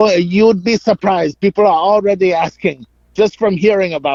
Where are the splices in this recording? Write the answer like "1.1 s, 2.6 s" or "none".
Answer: none

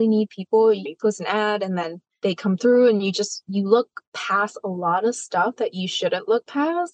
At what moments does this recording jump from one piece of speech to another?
0.9 s, 2.0 s

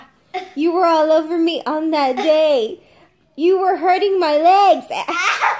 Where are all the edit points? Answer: none

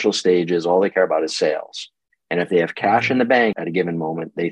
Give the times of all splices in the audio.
3.5 s

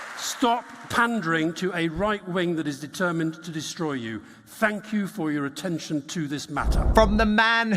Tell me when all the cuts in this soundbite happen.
6.8 s

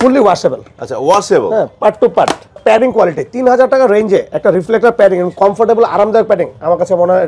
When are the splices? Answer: 2.6 s

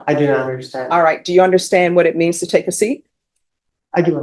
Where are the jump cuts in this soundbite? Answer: none

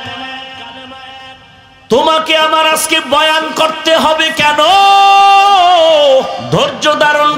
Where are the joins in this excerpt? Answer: 6.4 s

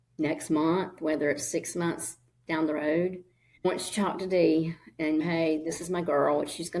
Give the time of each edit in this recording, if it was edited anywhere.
3.6 s

